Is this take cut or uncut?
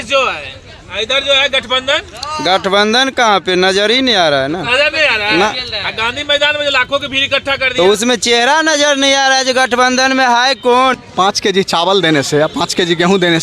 cut